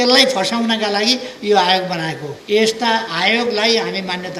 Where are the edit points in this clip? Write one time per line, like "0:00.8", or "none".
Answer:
0:02.3